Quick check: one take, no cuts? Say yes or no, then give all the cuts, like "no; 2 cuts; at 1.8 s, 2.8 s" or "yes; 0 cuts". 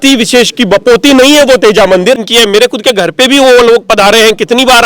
no; 1 cut; at 2.3 s